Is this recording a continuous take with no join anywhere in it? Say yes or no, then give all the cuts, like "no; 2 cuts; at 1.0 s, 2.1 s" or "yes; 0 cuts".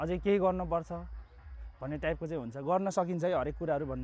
yes; 0 cuts